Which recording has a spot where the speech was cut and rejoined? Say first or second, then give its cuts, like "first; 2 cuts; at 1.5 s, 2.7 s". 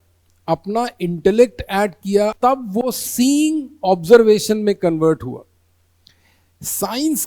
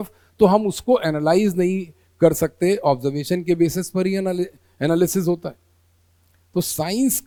first; 1 cut; at 2.3 s